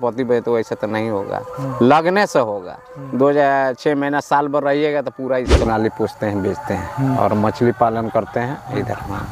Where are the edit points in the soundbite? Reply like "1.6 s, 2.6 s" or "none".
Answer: 5.7 s